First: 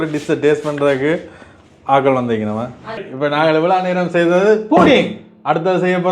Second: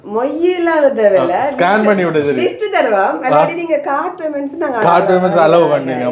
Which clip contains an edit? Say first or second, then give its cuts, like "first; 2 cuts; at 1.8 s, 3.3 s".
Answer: first; 1 cut; at 3.1 s